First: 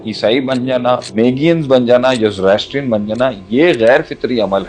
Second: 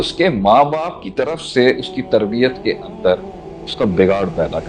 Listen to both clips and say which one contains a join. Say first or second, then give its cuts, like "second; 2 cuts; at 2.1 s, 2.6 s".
first; 1 cut; at 1.1 s